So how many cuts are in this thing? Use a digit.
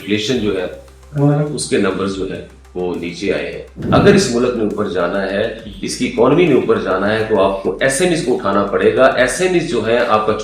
1